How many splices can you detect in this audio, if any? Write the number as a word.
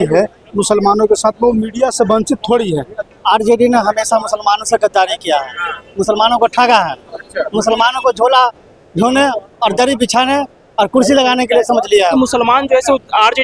two